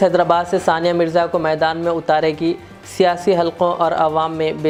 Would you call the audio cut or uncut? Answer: uncut